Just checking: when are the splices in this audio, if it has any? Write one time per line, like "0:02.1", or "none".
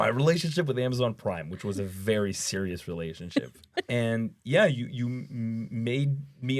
0:03.9